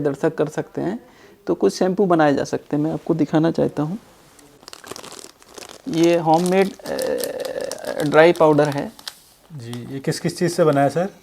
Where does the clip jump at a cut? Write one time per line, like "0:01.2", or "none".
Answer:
0:04.6